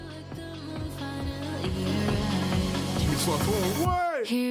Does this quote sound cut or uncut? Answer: uncut